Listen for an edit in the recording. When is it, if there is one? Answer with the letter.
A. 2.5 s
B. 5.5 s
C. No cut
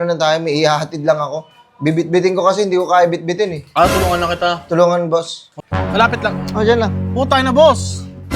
B